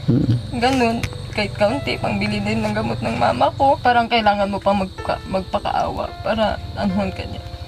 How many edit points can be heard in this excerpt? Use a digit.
1